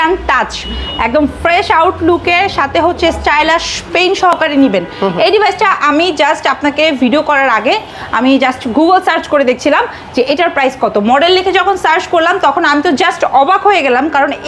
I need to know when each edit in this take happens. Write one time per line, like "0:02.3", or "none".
none